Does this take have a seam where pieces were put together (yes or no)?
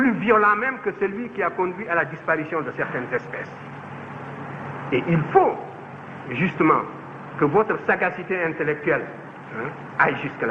no